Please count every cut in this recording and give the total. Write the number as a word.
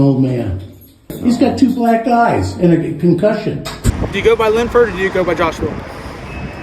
two